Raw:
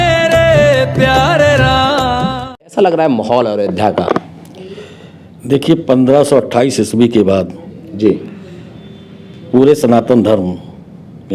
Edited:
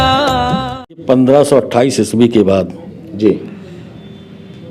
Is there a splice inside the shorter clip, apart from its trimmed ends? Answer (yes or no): yes